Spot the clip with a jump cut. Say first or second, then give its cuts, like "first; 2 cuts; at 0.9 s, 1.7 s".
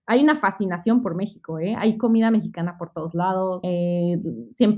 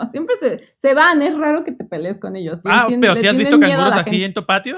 first; 1 cut; at 3.6 s